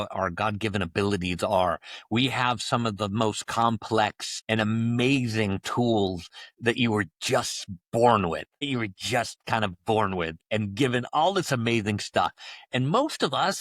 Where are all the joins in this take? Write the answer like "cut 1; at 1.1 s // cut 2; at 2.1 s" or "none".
none